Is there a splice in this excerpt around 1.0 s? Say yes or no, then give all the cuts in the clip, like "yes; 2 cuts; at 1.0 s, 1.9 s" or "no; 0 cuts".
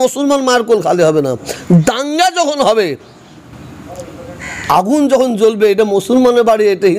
no; 0 cuts